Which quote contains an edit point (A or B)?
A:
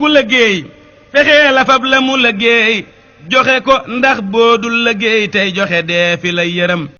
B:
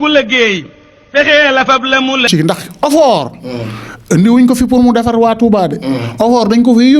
B